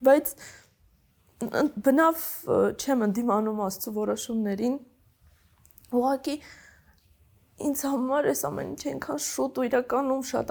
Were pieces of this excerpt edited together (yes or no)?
no